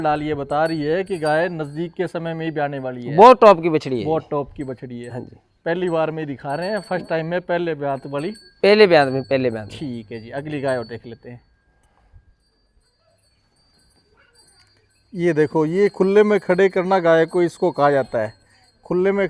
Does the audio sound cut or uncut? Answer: uncut